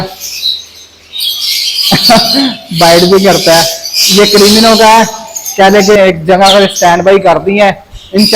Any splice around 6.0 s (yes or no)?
yes